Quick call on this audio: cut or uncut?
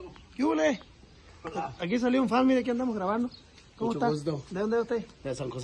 uncut